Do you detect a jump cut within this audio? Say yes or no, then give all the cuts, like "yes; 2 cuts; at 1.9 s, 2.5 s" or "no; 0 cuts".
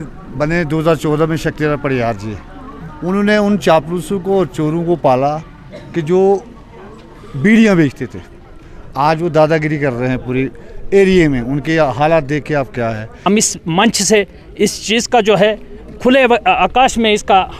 yes; 1 cut; at 13.1 s